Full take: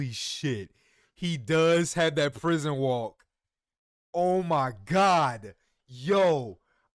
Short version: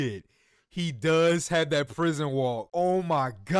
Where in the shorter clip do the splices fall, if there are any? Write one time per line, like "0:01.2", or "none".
0:02.6